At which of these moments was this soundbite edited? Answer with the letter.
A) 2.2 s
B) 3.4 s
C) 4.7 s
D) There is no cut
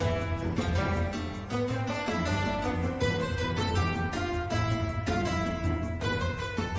D